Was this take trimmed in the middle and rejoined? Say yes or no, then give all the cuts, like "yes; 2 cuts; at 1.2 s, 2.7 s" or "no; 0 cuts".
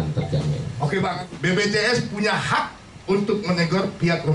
yes; 1 cut; at 1.2 s